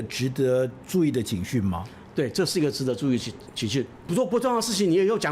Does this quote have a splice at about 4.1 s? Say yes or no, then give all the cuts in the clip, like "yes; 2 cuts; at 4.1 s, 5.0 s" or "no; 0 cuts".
yes; 1 cut; at 4.1 s